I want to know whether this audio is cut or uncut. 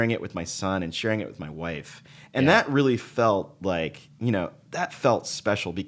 uncut